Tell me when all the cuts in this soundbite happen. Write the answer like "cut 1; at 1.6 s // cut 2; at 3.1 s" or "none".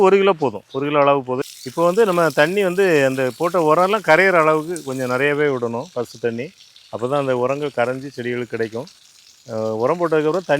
cut 1; at 1.4 s